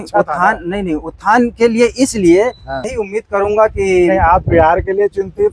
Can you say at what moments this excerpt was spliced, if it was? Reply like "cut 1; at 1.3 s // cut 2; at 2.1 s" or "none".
cut 1; at 2.8 s